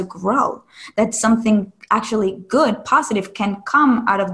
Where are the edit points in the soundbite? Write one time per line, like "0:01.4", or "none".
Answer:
none